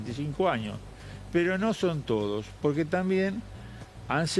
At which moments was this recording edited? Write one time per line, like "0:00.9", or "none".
none

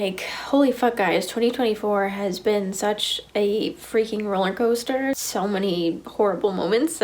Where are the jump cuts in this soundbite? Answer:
0:05.2

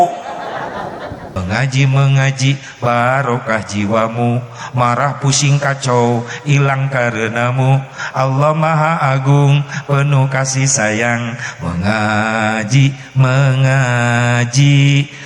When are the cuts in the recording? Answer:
0:01.3

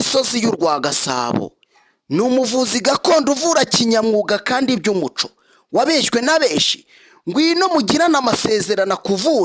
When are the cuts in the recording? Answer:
none

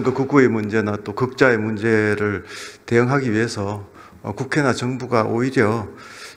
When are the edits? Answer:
none

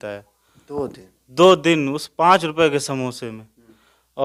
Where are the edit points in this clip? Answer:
none

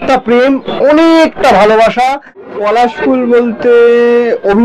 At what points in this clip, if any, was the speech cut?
0:02.4

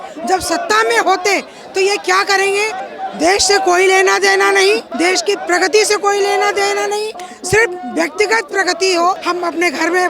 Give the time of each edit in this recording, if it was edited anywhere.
0:02.8
0:04.9
0:09.2

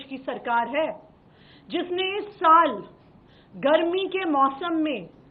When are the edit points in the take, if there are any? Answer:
none

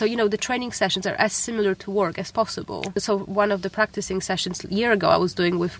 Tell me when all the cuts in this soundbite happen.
0:02.9

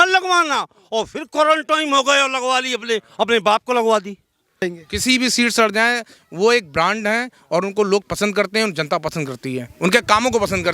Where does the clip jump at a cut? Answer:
0:04.6

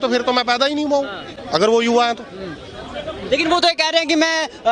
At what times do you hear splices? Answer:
none

